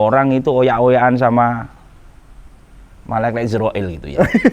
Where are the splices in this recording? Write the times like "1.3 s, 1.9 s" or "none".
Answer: none